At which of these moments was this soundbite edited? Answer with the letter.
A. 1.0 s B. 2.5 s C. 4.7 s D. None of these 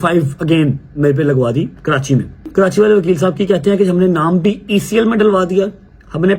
B